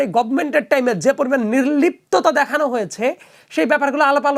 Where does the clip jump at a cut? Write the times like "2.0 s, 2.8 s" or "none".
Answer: none

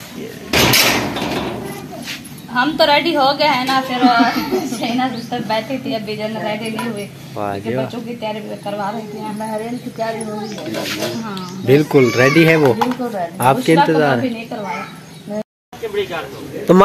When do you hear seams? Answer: 15.4 s

